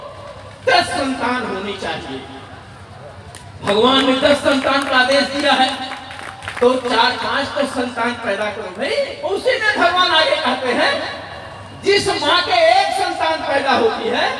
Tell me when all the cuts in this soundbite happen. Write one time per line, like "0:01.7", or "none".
0:09.1